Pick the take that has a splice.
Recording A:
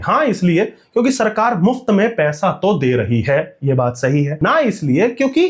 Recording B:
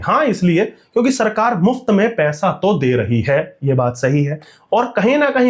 A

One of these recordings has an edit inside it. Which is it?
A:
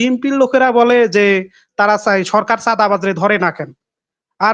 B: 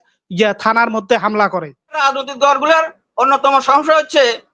B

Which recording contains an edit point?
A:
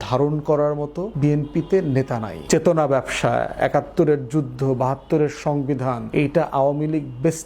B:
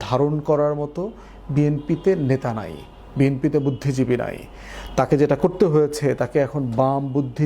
A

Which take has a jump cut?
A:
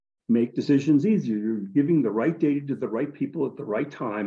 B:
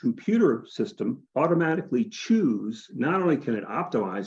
B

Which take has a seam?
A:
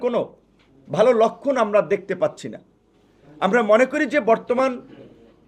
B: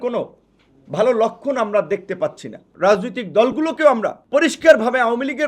B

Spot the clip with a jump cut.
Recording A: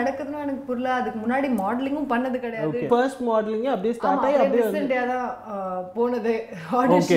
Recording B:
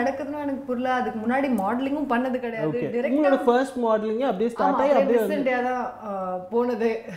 A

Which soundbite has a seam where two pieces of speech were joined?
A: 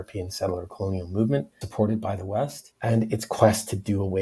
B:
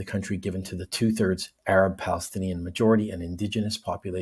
A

